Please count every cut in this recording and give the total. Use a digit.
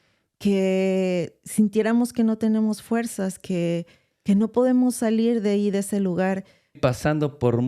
1